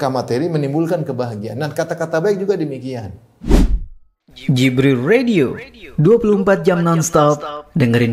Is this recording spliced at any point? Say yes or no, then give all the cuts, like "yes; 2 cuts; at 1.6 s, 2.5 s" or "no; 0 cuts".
yes; 1 cut; at 3.3 s